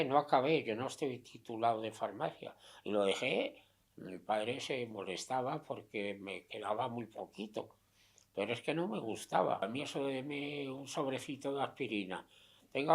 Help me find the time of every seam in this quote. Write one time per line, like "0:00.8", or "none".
0:09.6